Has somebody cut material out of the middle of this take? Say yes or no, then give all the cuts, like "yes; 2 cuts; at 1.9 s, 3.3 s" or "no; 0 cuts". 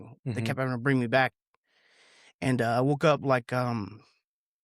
no; 0 cuts